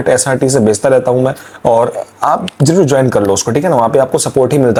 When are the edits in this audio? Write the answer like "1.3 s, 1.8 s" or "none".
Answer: none